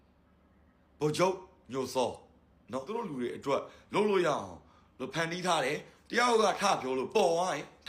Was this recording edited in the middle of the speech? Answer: yes; 1 cut; at 2.9 s

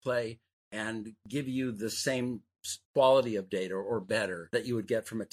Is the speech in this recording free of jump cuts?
yes; 0 cuts

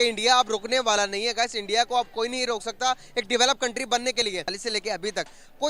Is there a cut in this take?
yes; 1 cut; at 4.6 s

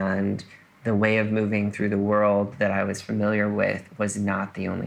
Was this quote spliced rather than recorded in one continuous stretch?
no; 0 cuts

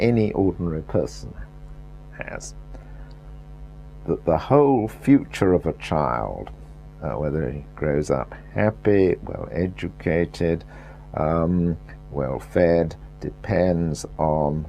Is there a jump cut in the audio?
yes; 1 cut; at 9.7 s

